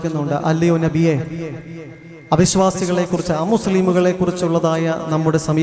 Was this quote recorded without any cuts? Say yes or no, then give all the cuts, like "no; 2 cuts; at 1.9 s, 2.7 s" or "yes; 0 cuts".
yes; 0 cuts